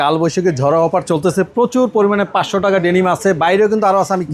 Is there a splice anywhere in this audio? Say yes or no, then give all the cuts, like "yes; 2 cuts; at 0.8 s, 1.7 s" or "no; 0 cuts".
no; 0 cuts